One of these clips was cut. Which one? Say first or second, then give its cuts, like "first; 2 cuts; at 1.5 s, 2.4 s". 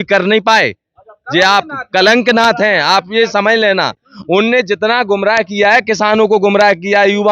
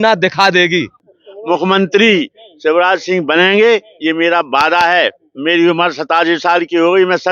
second; 1 cut; at 1.0 s